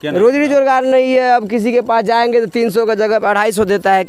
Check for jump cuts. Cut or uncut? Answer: uncut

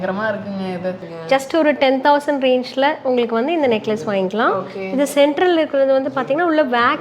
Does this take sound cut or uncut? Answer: cut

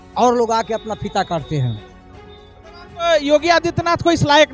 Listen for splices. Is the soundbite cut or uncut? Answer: uncut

